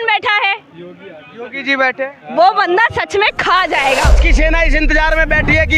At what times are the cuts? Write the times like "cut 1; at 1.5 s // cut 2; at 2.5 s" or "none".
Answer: cut 1; at 4.2 s